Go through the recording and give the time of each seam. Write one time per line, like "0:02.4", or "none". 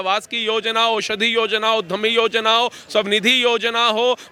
none